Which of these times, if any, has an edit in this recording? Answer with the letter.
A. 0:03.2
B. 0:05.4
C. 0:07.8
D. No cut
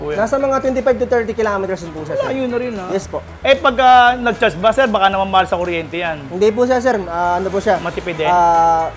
D